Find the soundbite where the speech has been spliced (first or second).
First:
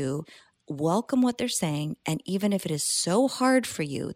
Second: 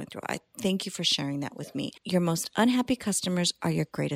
second